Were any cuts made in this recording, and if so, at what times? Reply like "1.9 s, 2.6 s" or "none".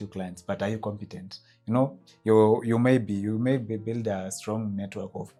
none